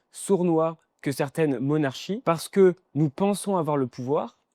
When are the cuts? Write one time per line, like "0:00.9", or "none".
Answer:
0:02.1